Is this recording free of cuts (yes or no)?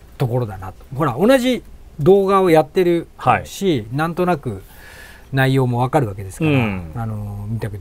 yes